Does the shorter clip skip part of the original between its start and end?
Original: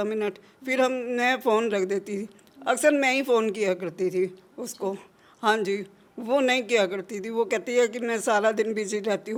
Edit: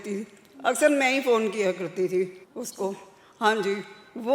no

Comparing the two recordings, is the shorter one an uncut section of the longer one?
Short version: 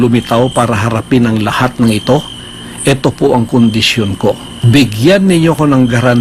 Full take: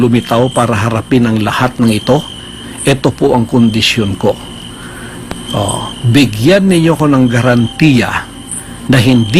no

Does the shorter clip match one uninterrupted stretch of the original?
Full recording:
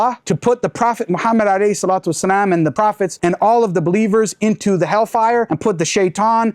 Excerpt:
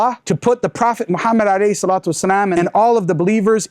no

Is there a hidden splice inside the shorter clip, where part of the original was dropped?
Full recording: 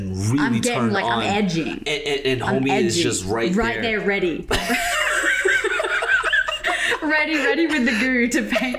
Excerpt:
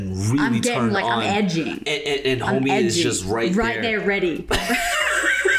no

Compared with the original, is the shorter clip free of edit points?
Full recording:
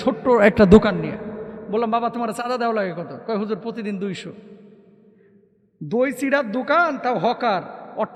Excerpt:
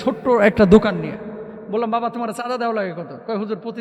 yes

